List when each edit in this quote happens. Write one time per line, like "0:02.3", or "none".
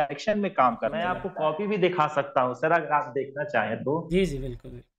0:01.2

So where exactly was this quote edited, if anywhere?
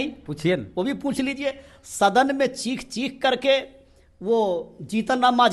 none

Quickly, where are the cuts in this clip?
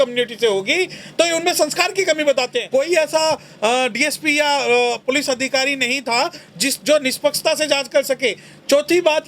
0:02.6

